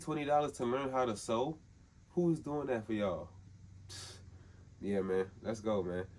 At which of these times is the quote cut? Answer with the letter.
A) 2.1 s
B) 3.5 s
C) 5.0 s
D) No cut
D